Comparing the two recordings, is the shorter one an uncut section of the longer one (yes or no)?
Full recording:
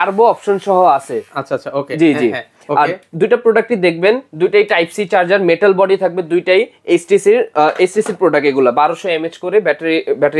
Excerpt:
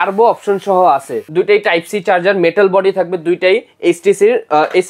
no